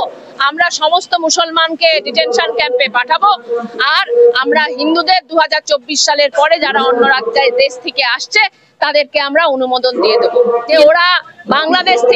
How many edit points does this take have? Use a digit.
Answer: 1